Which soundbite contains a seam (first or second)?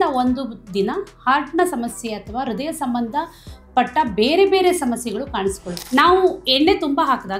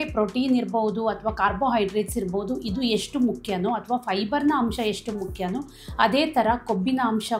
first